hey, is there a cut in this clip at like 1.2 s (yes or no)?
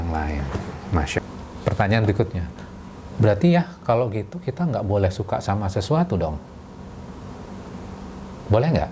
yes